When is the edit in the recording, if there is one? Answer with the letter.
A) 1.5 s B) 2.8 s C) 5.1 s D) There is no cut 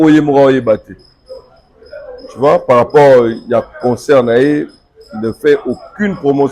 D